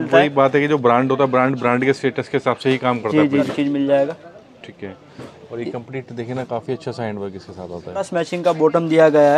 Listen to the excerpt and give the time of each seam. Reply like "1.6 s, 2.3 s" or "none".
3.5 s, 8.1 s